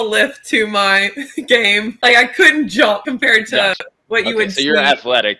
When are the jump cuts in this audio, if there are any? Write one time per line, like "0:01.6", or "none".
0:02.0
0:03.0